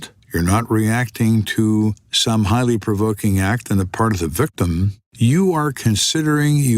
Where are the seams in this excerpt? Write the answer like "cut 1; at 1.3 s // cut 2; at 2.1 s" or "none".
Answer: cut 1; at 2.1 s // cut 2; at 5.0 s